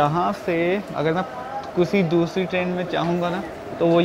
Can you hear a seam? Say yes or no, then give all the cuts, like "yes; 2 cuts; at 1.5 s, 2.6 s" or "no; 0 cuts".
no; 0 cuts